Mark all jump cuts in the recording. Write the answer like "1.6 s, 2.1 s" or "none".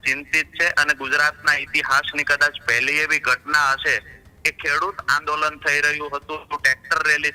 none